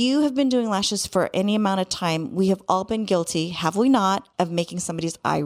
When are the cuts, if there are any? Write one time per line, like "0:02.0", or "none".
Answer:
0:04.3